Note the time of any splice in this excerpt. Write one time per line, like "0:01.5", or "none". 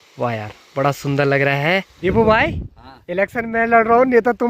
0:01.9